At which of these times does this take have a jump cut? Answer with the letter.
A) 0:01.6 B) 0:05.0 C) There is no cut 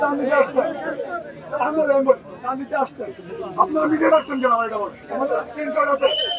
B